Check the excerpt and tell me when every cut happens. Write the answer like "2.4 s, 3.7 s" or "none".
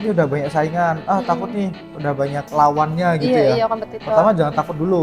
2.4 s